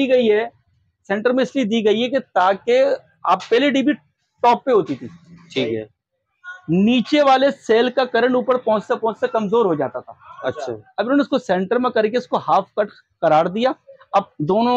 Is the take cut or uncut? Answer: uncut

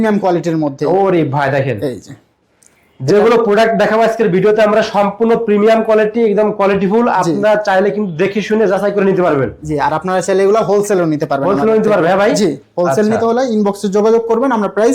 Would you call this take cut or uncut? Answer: uncut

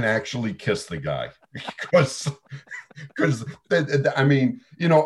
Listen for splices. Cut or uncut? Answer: uncut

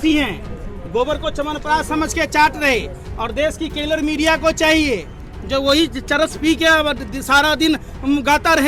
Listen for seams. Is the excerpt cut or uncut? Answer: uncut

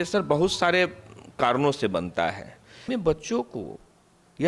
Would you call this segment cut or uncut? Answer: cut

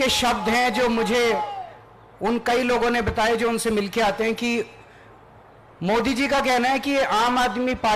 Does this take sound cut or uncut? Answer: uncut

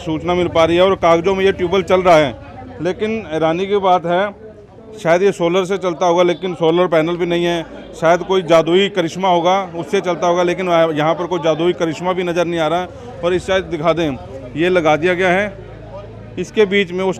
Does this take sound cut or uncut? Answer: uncut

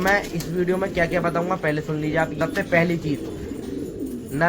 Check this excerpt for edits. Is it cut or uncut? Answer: cut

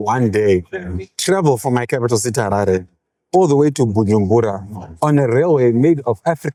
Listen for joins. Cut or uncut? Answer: uncut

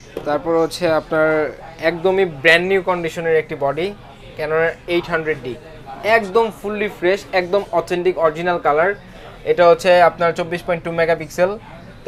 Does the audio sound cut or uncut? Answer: uncut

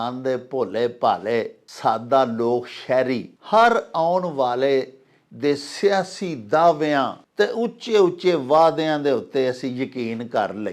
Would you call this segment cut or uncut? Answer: cut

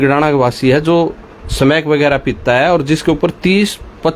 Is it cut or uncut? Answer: uncut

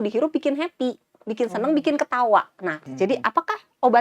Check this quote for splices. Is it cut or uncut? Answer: cut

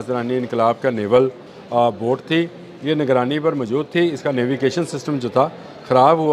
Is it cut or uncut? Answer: uncut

